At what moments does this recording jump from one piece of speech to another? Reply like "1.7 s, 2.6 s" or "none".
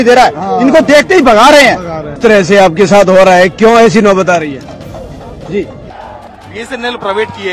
2.1 s, 5.9 s